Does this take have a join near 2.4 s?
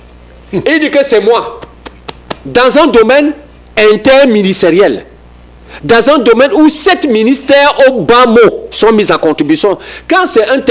no; 0 cuts

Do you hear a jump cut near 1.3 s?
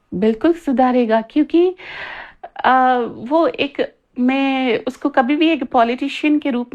no; 0 cuts

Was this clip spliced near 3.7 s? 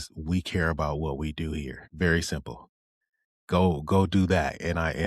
no; 1 cut; at 1.8 s

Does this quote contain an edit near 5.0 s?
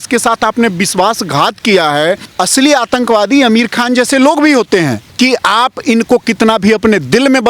yes; 2 cuts; at 2.3 s, 5.0 s

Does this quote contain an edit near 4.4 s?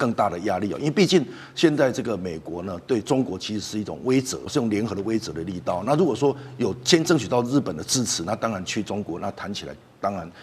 yes; 1 cut; at 4.4 s

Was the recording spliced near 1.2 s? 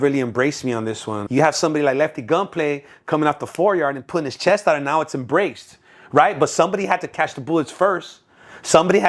yes; 1 cut; at 1.2 s

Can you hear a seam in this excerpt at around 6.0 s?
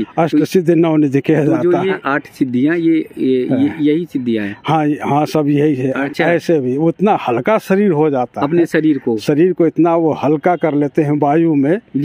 yes; 2 cuts; at 2.0 s, 6.0 s

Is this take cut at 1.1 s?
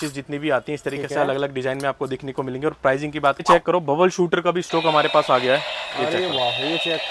no; 1 cut; at 3.4 s

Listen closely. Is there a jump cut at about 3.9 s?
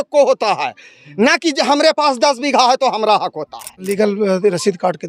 yes; 1 cut; at 3.9 s

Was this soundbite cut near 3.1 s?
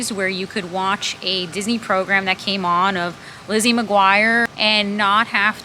no; 1 cut; at 4.5 s

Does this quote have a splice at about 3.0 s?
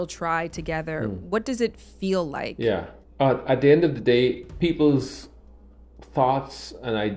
yes; 1 cut; at 3.0 s

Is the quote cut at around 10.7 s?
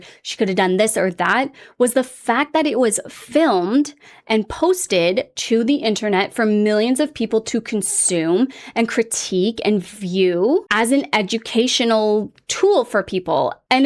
yes; 1 cut; at 10.7 s

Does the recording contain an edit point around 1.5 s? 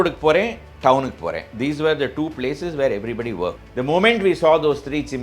no; 1 cut; at 3.6 s

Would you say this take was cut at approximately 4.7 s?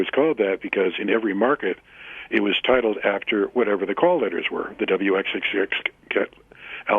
no; 0 cuts

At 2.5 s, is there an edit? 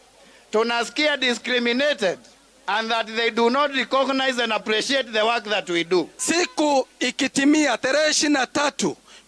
no; 1 cut; at 6.2 s

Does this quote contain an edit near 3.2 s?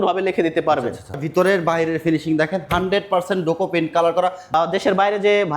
no; 2 cuts; at 1.2 s, 4.5 s

